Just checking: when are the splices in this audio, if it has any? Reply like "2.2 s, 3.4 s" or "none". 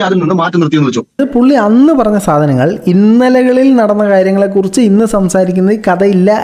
1.2 s